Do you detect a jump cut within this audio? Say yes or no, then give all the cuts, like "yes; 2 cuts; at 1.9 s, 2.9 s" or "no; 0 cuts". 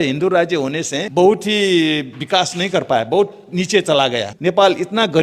yes; 2 cuts; at 0.9 s, 4.3 s